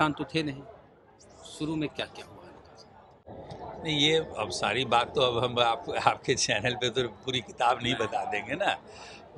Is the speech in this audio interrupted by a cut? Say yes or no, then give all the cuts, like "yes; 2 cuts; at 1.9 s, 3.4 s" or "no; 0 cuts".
no; 0 cuts